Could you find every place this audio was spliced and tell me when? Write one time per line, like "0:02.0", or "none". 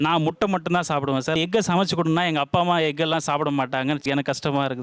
0:01.3